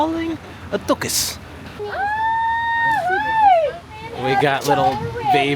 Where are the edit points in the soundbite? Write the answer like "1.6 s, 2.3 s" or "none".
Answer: 1.7 s, 4.0 s